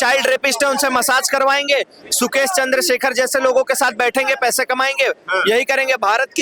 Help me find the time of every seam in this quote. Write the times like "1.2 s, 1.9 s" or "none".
none

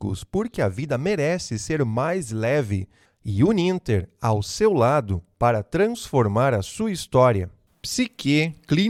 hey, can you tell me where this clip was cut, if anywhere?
none

